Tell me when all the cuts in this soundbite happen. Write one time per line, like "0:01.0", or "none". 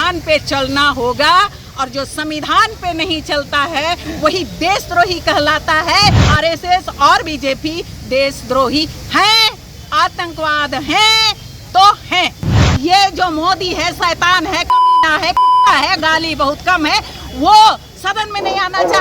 0:06.2
0:12.6